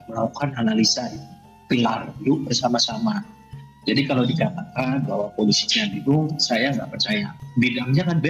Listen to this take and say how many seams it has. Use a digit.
1